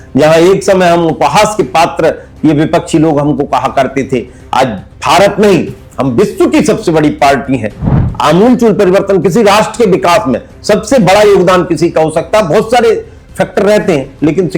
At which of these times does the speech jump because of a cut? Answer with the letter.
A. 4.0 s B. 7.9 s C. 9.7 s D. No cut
B